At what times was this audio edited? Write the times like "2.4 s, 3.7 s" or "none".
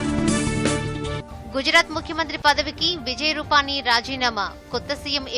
none